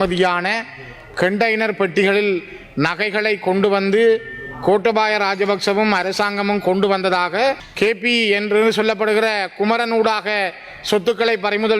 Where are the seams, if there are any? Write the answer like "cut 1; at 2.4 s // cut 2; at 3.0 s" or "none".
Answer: cut 1; at 7.7 s